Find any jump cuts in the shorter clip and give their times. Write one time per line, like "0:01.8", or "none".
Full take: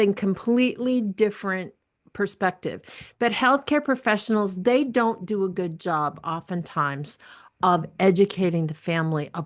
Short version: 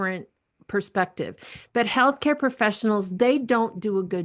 none